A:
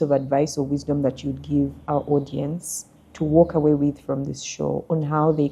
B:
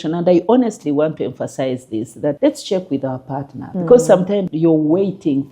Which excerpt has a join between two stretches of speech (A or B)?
B